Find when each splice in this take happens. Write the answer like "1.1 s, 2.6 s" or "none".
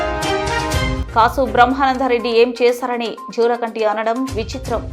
1.0 s